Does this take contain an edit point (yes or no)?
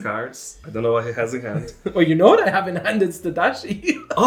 no